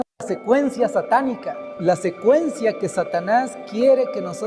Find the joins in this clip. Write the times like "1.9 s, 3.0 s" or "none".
1.7 s